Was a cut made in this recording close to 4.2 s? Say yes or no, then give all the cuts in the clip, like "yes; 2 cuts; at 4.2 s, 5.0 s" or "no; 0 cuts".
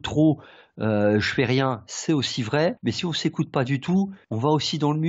yes; 2 cuts; at 2.8 s, 4.2 s